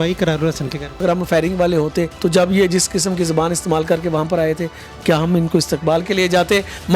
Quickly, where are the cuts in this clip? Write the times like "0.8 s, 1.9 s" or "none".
1.0 s, 2.1 s